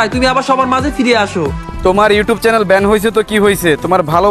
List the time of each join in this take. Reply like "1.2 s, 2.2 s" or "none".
1.7 s